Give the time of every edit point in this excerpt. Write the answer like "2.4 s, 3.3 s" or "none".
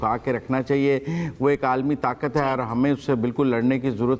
none